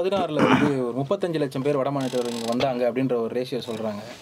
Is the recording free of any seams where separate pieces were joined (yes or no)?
yes